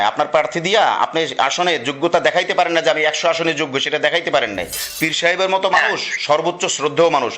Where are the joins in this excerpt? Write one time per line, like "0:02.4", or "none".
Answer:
0:04.8